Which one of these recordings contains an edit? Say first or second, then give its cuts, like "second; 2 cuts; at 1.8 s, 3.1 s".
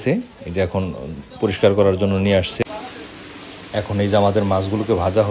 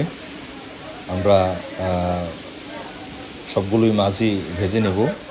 first; 1 cut; at 2.6 s